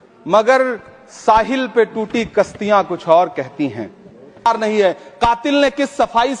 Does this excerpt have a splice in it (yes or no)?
yes